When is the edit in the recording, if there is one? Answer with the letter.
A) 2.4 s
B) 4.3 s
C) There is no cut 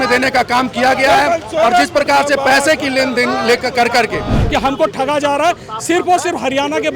B